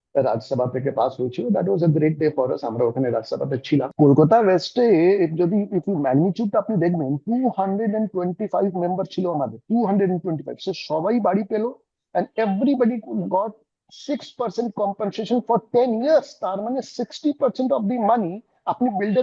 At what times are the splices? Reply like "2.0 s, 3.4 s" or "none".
3.9 s